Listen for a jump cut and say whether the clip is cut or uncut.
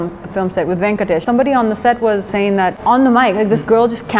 cut